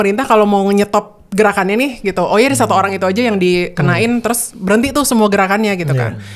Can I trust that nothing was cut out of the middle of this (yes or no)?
yes